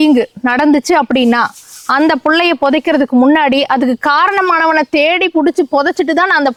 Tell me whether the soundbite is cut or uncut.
uncut